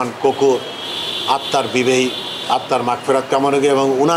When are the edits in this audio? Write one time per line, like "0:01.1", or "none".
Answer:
none